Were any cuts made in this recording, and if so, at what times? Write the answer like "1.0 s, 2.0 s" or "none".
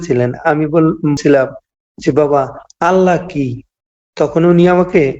1.2 s